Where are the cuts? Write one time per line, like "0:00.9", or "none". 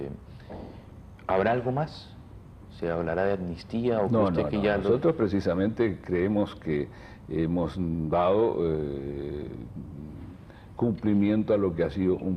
0:02.5